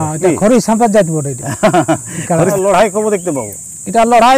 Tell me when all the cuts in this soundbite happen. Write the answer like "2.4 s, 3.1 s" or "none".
2.5 s